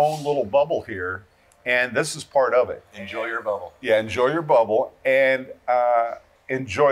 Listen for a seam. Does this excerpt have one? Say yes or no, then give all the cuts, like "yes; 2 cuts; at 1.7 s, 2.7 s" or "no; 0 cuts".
no; 0 cuts